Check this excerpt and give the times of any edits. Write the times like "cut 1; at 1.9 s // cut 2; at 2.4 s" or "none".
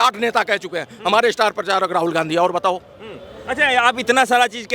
none

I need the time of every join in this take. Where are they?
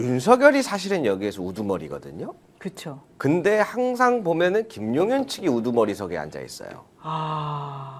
none

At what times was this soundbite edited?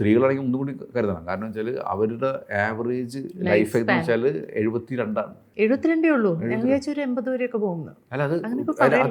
none

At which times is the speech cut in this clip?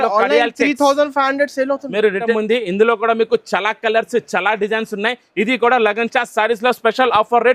cut 1; at 2.3 s

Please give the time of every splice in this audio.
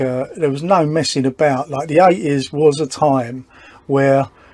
none

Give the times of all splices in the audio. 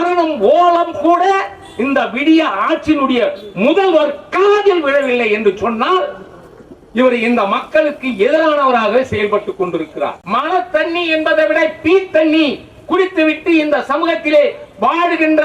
cut 1; at 10.2 s

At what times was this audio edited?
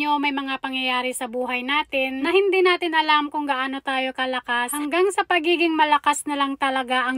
cut 1; at 2.2 s // cut 2; at 4.7 s

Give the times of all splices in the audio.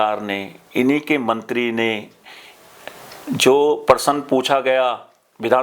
none

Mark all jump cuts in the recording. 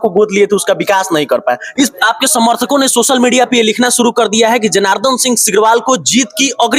cut 1; at 1.9 s

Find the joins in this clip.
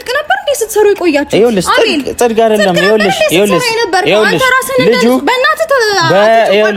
none

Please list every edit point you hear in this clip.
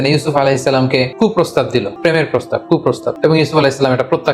cut 1; at 1.1 s // cut 2; at 1.9 s // cut 3; at 3.1 s

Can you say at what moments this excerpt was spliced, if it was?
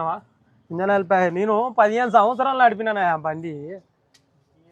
none

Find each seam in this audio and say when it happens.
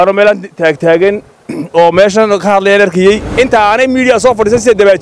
cut 1; at 3.3 s

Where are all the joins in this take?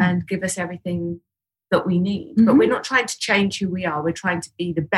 none

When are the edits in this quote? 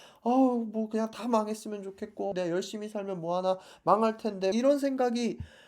cut 1; at 2.3 s // cut 2; at 4.5 s

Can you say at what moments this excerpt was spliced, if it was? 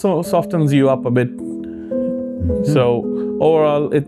none

